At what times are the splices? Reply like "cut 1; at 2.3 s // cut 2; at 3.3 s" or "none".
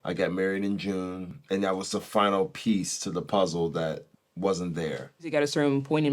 cut 1; at 1.3 s // cut 2; at 4.1 s // cut 3; at 5.3 s